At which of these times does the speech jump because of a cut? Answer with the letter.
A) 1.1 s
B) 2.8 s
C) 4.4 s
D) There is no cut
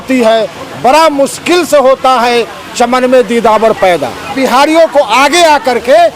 C